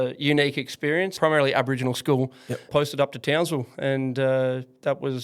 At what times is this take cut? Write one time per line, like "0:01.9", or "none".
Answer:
0:01.1
0:02.7